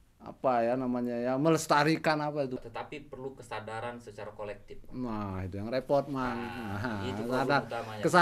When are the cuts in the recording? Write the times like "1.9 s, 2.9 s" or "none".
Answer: 2.6 s